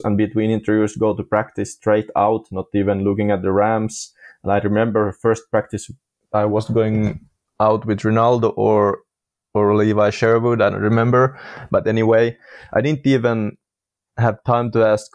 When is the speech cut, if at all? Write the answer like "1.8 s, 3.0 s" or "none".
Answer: none